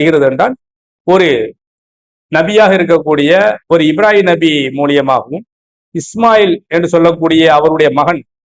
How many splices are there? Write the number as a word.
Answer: zero